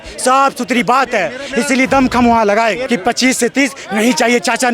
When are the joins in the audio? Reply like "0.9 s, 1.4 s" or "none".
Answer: 2.8 s